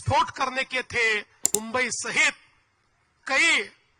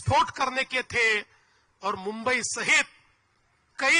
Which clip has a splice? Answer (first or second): first